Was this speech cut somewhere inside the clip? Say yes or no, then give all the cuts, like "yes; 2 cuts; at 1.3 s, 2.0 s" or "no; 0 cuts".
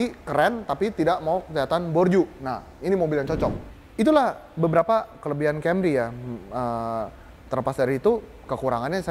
no; 0 cuts